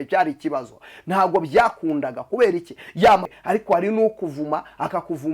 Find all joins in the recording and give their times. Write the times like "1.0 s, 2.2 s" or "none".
3.3 s